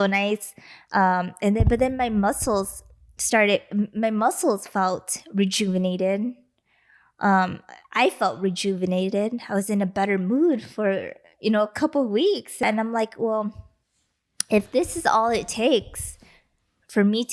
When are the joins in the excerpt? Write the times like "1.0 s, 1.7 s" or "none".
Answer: 12.6 s